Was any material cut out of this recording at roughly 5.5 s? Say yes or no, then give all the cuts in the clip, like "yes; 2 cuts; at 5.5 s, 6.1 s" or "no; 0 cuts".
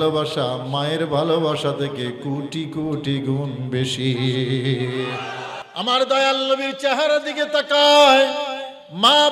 yes; 1 cut; at 5.5 s